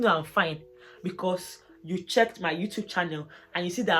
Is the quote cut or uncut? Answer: uncut